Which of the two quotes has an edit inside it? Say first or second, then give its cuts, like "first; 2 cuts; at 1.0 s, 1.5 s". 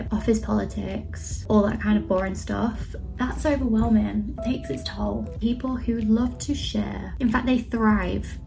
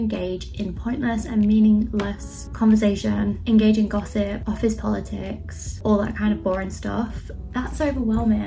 first; 2 cuts; at 5.4 s, 7.0 s